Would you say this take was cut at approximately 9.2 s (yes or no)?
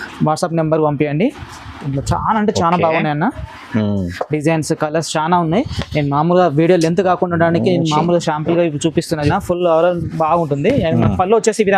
yes